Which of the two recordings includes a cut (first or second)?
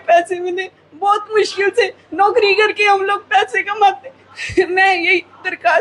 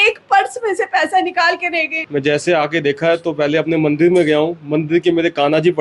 second